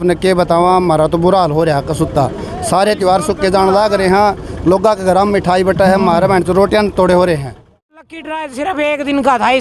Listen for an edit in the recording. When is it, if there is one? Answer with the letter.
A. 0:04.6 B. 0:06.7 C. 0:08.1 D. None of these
C